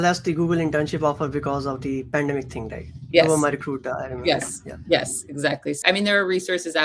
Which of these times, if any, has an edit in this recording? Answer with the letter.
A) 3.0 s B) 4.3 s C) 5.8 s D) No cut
C